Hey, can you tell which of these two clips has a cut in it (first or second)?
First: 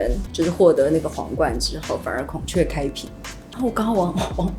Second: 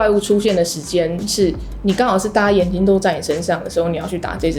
first